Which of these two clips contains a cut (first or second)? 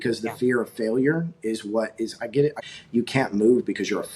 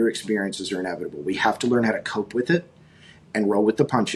first